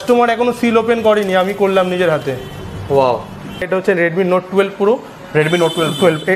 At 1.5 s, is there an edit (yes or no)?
no